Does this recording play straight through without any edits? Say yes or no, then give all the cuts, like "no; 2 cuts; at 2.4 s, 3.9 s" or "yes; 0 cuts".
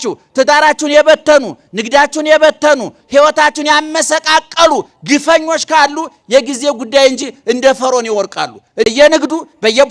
no; 1 cut; at 8.9 s